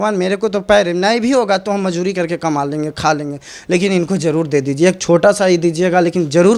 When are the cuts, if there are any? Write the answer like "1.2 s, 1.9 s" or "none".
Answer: none